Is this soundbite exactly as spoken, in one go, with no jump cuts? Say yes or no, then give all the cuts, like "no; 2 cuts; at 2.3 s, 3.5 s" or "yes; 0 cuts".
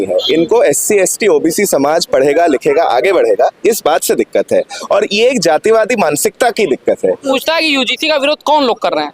no; 1 cut; at 7.3 s